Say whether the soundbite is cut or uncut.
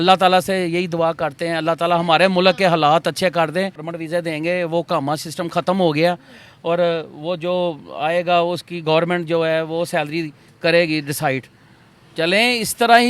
cut